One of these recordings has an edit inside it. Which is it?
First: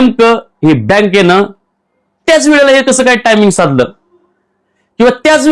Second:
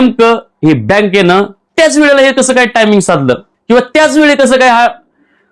second; 2 cuts; at 1.6 s, 3.5 s

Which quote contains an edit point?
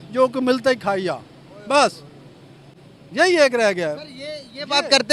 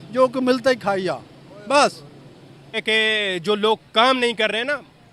second; 1 cut; at 2.8 s

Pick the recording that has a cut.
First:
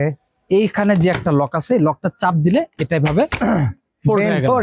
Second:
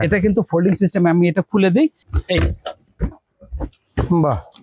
second; 1 cut; at 2.1 s

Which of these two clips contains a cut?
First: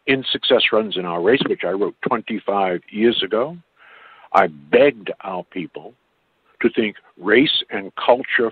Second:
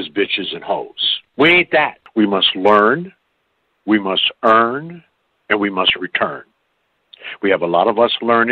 second; 2 cuts; at 0.9 s, 2.0 s

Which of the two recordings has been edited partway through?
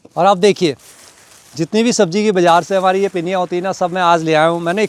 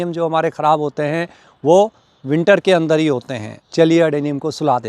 second; 1 cut; at 3.6 s

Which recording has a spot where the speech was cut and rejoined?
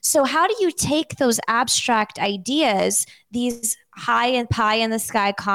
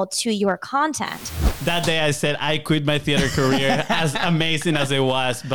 second; 1 cut; at 1.5 s

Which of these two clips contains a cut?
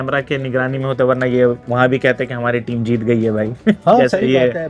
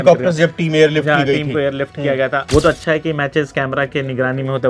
second; 1 cut; at 2.4 s

